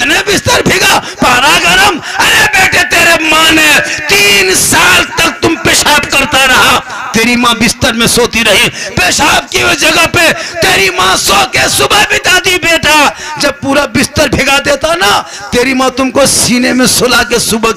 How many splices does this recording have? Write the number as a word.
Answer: zero